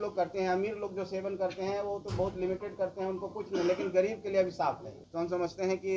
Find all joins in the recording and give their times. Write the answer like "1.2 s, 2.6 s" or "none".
5.0 s